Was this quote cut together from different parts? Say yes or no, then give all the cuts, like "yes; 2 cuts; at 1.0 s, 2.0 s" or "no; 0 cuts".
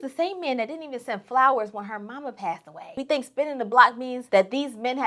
yes; 2 cuts; at 2.9 s, 4.1 s